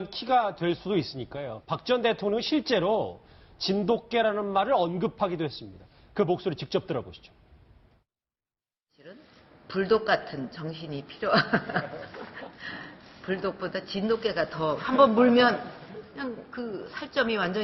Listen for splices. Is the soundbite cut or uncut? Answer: uncut